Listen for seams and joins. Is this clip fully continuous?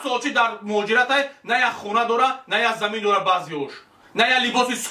yes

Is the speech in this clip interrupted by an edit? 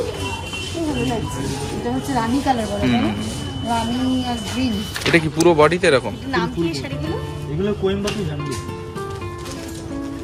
no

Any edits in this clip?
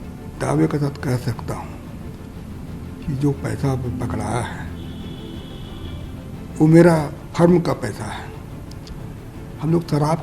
no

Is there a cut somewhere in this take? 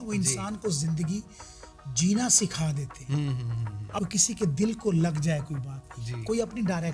yes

